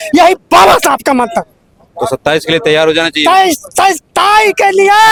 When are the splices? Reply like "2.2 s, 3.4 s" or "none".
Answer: none